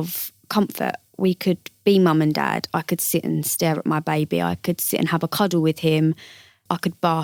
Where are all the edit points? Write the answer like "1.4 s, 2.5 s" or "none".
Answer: none